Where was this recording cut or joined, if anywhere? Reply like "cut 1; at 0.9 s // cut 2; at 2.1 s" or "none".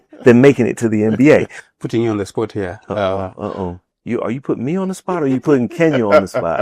cut 1; at 1.6 s // cut 2; at 3.9 s